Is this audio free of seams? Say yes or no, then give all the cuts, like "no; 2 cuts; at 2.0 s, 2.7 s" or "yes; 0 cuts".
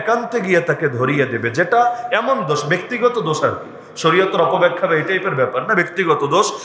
yes; 0 cuts